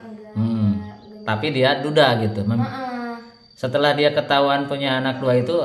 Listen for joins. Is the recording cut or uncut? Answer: uncut